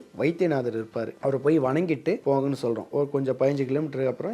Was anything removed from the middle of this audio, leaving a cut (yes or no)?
yes